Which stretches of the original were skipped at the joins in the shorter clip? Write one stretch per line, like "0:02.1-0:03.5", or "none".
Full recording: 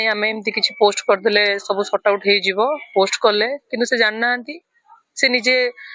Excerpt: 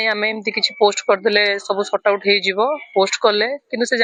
none